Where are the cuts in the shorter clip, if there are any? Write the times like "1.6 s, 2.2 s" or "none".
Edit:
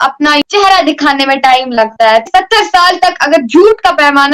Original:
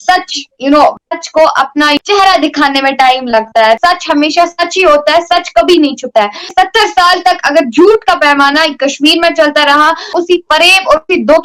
2.2 s